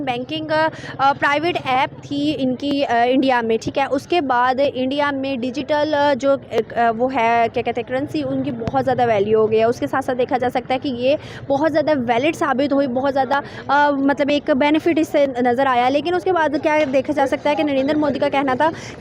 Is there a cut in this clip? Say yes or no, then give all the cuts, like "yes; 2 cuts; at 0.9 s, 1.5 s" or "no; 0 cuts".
no; 0 cuts